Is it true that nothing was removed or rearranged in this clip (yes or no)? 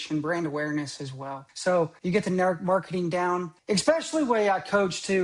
no